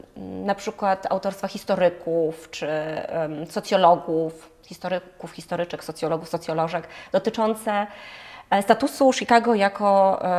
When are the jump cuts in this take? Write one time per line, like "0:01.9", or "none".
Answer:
none